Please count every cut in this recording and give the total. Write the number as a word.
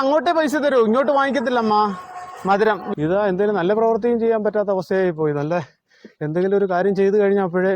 one